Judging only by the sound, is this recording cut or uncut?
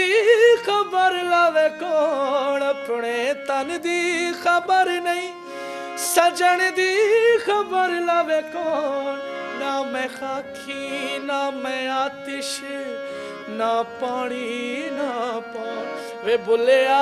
uncut